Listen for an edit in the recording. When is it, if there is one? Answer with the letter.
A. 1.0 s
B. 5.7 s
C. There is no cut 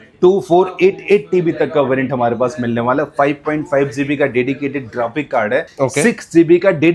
B